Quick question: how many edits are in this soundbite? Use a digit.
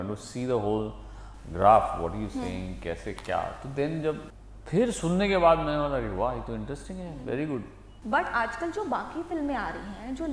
2